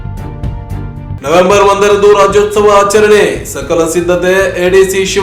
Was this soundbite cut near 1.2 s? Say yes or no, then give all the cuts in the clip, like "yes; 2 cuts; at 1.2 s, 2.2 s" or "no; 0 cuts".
no; 0 cuts